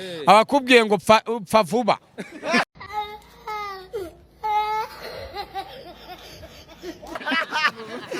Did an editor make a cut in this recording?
yes; 1 cut; at 2.7 s

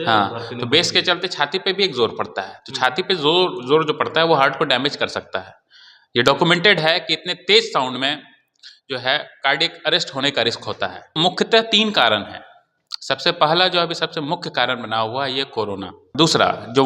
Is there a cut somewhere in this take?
yes; 2 cuts; at 11.1 s, 16.1 s

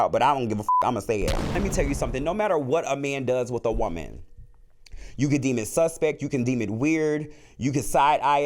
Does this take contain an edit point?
yes; 1 cut; at 1.6 s

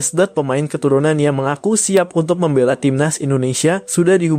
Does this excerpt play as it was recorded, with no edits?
yes; 0 cuts

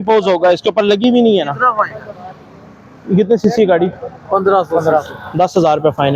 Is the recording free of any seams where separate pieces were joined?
yes; 0 cuts

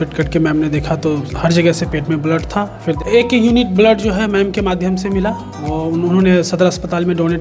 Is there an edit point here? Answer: yes; 1 cut; at 3.0 s

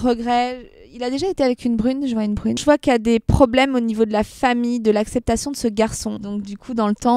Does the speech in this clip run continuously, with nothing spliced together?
no; 1 cut; at 2.6 s

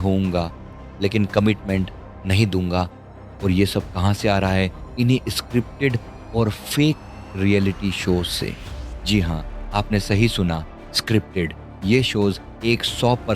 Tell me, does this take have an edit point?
no; 0 cuts

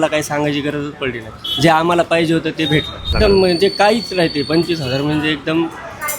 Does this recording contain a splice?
yes; 1 cut; at 3.1 s

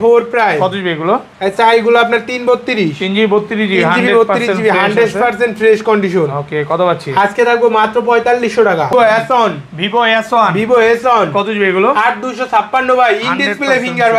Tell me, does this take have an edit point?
yes; 1 cut; at 8.9 s

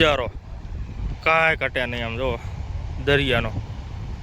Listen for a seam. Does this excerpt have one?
no; 0 cuts

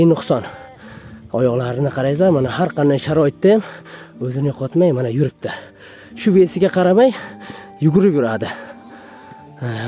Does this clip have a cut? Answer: no; 0 cuts

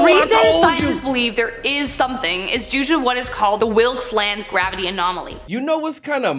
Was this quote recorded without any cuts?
no; 1 cut; at 5.4 s

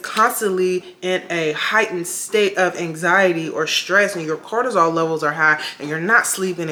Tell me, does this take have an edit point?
no; 0 cuts

